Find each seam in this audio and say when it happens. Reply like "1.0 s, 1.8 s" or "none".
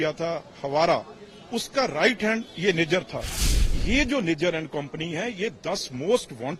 3.4 s